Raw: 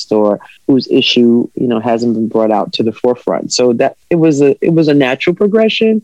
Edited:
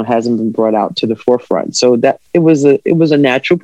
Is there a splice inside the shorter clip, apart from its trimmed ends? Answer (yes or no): no